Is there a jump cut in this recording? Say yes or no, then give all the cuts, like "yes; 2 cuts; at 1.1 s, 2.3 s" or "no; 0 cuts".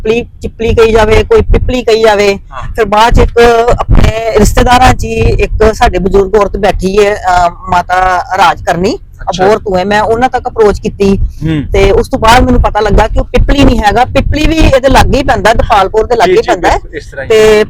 no; 0 cuts